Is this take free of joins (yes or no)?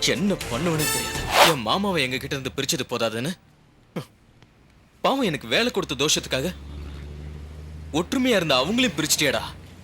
no